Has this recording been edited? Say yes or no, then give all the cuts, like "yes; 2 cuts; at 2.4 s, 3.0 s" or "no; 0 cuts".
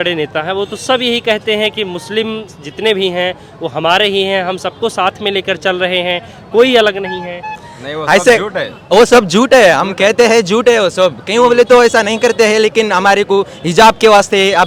no; 0 cuts